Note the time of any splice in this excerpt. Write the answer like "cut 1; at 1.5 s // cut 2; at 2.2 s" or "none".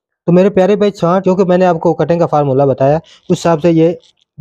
cut 1; at 1.2 s